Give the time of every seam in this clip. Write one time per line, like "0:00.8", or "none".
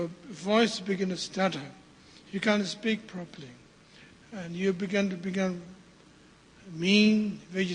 0:01.1